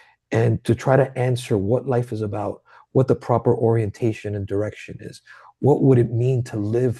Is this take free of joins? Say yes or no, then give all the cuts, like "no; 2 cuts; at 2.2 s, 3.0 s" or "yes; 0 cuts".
yes; 0 cuts